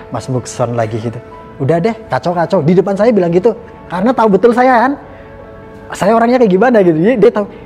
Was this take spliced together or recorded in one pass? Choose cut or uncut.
uncut